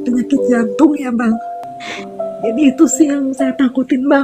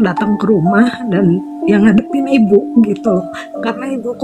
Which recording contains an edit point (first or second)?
first